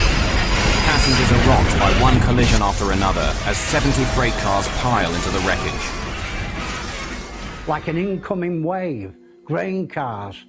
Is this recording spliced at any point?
no; 0 cuts

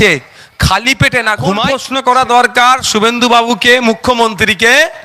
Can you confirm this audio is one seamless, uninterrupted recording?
no; 1 cut; at 1.8 s

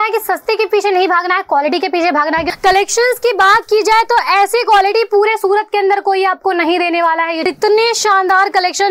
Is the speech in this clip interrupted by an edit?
yes; 2 cuts; at 2.5 s, 7.5 s

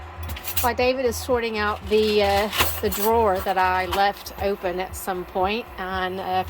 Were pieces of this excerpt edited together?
no; 0 cuts

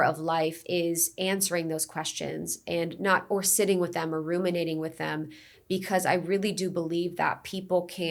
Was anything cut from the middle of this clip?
no; 0 cuts

